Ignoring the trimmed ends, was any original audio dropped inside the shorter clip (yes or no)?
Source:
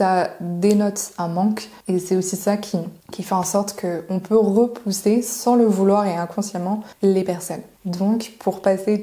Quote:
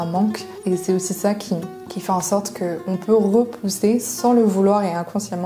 no